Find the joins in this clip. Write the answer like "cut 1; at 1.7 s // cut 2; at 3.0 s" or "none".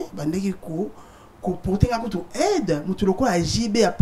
none